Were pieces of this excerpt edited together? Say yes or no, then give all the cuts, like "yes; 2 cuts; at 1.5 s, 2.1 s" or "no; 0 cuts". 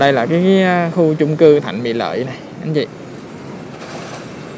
no; 0 cuts